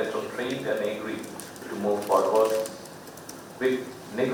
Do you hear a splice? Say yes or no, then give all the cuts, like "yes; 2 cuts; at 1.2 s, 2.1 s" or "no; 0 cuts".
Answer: no; 0 cuts